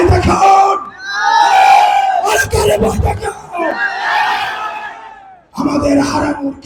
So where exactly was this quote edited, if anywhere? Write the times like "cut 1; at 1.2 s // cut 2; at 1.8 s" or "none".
none